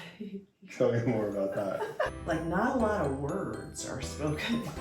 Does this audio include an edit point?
yes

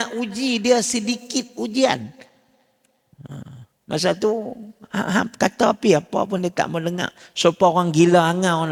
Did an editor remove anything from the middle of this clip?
no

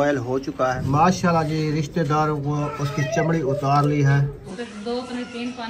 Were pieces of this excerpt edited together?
yes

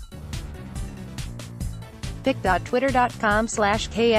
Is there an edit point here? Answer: yes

